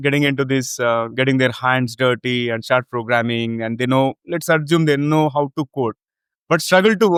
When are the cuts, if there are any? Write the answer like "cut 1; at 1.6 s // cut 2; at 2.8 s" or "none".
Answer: none